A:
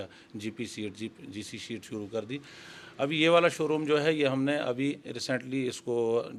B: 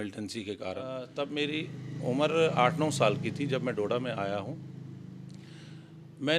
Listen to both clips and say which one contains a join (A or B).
B